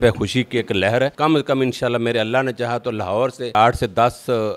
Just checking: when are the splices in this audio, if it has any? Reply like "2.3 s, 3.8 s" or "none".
1.1 s, 3.5 s